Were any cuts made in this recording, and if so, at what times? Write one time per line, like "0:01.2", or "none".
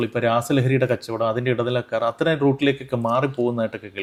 none